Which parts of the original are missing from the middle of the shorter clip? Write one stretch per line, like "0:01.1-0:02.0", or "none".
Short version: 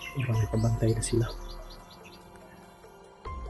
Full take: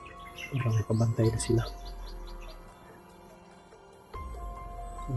0:01.7-0:02.2